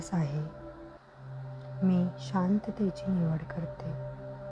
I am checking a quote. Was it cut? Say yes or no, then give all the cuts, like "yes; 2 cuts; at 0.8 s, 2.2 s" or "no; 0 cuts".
yes; 1 cut; at 3.5 s